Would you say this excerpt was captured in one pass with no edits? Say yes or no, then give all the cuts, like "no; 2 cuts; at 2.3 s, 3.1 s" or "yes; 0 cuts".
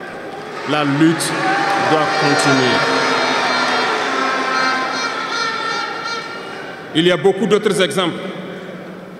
yes; 0 cuts